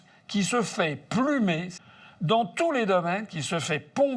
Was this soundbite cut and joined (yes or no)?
yes